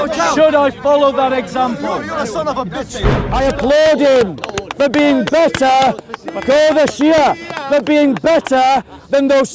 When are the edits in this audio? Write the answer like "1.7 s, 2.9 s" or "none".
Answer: 3.2 s